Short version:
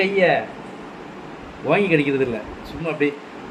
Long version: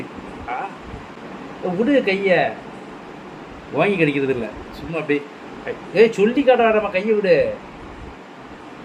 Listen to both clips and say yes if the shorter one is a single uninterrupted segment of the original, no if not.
yes